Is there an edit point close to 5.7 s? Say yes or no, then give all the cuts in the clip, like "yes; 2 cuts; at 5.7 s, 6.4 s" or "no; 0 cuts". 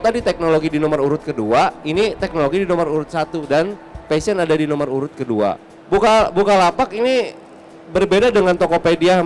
yes; 1 cut; at 5.7 s